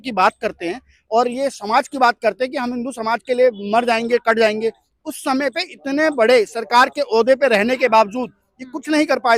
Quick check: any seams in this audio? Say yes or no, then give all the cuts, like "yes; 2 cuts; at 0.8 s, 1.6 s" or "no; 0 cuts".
no; 0 cuts